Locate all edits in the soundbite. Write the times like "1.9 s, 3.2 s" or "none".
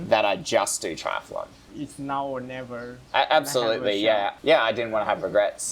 1.6 s, 4.3 s